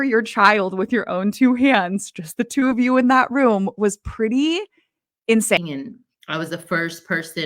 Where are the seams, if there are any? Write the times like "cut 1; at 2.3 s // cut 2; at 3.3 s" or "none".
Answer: cut 1; at 5.6 s